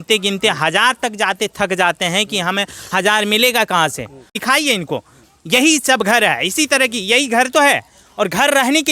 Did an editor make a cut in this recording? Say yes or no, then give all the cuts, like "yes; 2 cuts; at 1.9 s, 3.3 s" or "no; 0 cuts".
yes; 1 cut; at 4.3 s